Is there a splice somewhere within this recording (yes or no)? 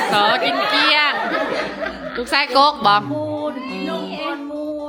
no